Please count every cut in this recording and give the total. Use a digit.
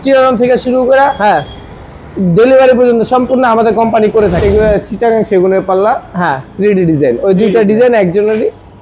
1